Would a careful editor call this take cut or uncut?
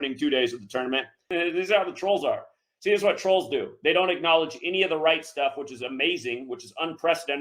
cut